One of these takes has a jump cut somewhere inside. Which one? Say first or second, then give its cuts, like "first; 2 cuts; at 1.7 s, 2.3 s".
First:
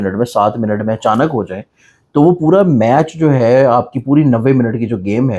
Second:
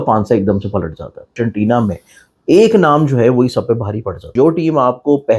second; 2 cuts; at 1.3 s, 4.3 s